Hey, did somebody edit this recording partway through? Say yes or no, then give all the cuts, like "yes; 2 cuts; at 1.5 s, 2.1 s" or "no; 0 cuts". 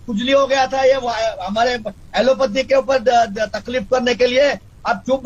no; 0 cuts